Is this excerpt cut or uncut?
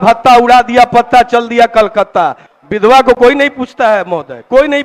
cut